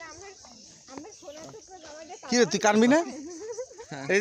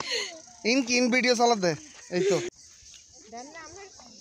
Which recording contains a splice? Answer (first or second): second